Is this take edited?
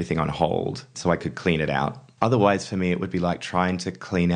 yes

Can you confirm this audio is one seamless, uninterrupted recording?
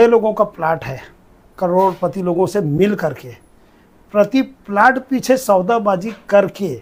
yes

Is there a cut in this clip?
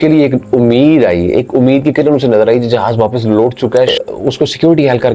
yes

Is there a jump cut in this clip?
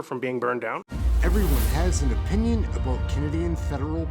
yes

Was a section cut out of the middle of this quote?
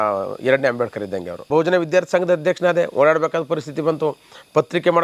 yes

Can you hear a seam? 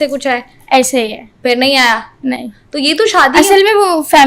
no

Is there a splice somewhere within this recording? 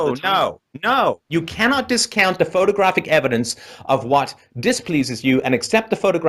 no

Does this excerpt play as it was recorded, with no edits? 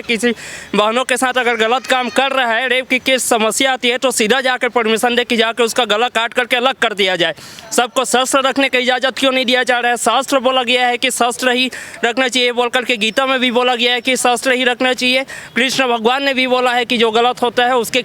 yes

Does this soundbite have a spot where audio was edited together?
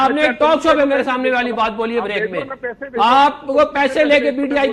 no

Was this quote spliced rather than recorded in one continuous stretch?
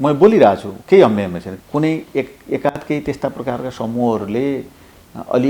yes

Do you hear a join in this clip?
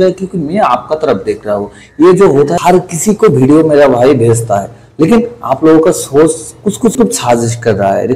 yes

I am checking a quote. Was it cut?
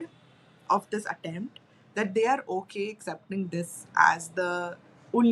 no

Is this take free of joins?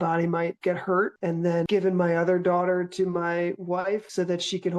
yes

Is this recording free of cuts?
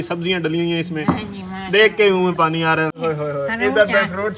no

